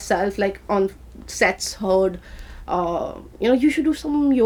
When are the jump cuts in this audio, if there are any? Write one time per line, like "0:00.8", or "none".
none

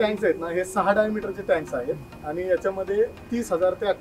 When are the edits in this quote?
none

